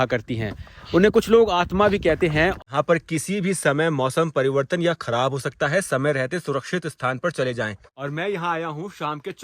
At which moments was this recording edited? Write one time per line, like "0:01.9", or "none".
0:02.5
0:07.9